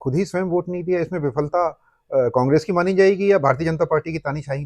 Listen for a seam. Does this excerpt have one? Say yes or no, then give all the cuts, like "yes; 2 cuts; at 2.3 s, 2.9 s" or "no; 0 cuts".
no; 0 cuts